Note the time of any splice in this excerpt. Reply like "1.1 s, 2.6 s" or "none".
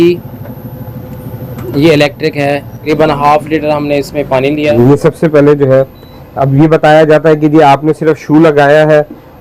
2.9 s, 4.7 s